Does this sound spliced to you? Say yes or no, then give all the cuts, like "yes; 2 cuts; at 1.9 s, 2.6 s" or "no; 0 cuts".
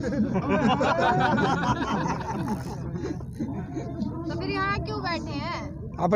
no; 0 cuts